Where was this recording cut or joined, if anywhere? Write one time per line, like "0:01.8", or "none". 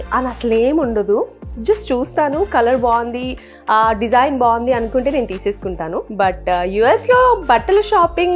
none